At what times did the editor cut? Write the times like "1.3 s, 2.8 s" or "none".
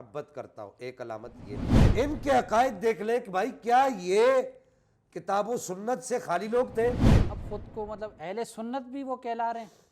1.7 s, 7.2 s